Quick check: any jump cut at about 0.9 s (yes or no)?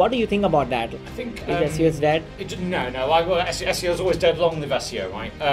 yes